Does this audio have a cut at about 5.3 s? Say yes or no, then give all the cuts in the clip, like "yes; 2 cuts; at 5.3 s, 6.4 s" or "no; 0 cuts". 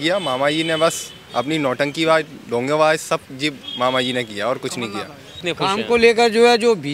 yes; 1 cut; at 5.3 s